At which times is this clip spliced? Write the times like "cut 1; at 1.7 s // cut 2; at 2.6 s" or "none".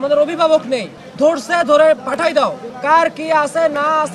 cut 1; at 1.0 s // cut 2; at 2.7 s